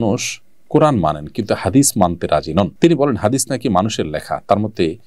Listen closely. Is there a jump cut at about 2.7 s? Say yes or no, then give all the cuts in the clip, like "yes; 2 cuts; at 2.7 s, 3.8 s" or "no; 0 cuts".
yes; 1 cut; at 2.7 s